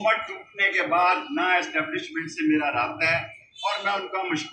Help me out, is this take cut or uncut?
uncut